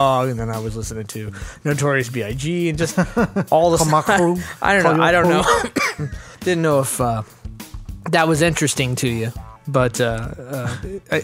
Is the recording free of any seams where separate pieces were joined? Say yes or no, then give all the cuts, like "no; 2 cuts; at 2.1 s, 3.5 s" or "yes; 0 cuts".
no; 1 cut; at 10.0 s